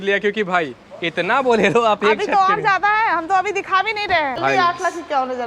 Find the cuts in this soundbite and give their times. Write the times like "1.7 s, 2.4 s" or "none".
4.4 s